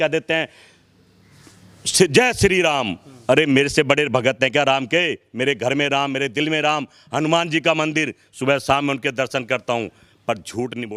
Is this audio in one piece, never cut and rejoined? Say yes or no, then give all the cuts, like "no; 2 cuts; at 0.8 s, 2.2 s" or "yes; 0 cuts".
yes; 0 cuts